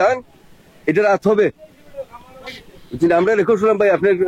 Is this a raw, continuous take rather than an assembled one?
yes; 0 cuts

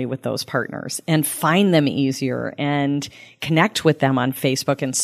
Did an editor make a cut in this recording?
no; 0 cuts

